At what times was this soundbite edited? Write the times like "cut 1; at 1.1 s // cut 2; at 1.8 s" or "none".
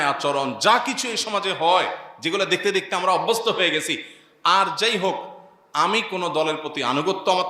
none